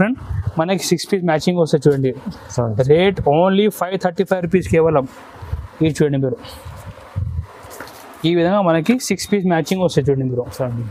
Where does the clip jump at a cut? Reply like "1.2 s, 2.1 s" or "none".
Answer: none